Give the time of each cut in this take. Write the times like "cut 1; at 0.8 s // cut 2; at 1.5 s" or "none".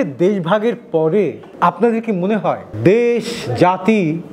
cut 1; at 1.4 s

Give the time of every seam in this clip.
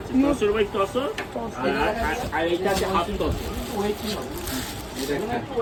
none

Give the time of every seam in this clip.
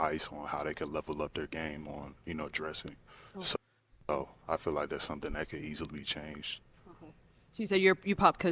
cut 1; at 4.1 s

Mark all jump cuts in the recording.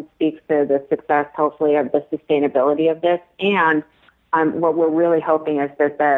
none

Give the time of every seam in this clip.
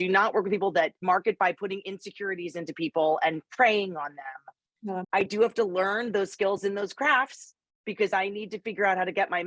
cut 1; at 1.0 s // cut 2; at 5.0 s

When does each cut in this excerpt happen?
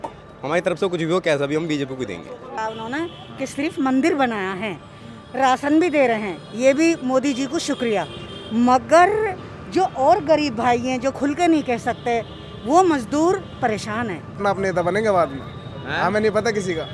cut 1; at 2.6 s // cut 2; at 14.4 s

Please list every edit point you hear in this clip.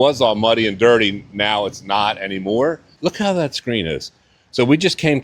cut 1; at 2.9 s

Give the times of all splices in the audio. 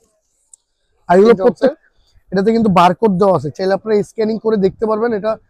cut 1; at 1.7 s

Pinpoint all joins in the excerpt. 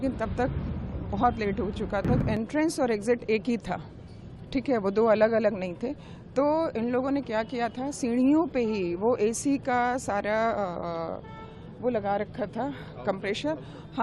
cut 1; at 2.2 s

